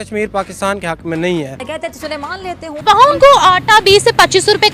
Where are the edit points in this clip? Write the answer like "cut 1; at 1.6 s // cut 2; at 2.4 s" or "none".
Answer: cut 1; at 2.1 s